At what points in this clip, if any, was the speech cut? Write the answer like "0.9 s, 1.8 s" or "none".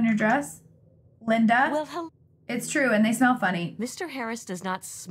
2.0 s